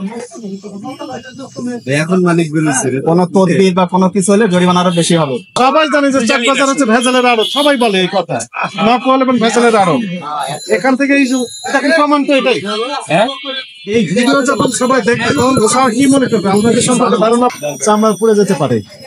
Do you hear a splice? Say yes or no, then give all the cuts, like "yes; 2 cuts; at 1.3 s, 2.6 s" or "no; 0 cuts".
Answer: yes; 2 cuts; at 5.5 s, 17.5 s